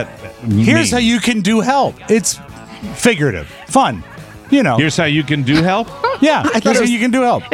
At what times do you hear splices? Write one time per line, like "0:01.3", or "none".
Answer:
none